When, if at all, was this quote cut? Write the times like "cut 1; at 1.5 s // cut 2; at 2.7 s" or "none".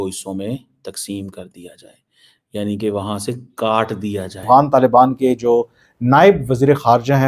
cut 1; at 4.4 s